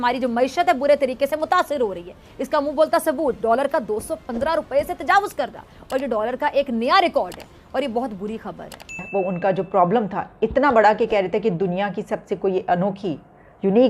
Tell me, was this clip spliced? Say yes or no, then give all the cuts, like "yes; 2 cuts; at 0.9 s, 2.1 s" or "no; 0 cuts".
yes; 1 cut; at 9.0 s